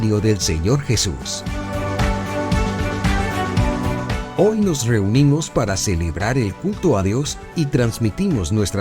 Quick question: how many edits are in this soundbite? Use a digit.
2